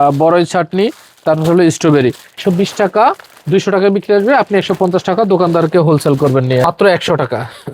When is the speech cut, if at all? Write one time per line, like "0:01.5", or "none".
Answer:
0:02.4
0:06.6